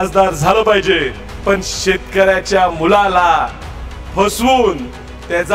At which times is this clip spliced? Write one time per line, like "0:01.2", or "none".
0:01.3